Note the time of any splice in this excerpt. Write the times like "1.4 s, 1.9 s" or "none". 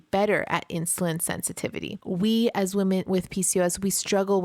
1.9 s, 3.0 s